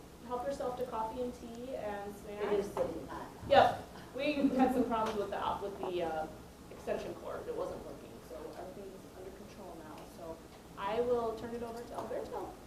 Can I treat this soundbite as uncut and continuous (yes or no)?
yes